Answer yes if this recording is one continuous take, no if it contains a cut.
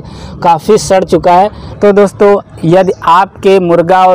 no